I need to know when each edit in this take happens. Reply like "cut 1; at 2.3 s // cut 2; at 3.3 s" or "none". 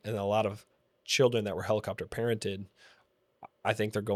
none